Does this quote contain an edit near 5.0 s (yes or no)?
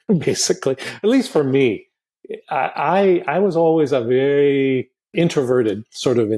yes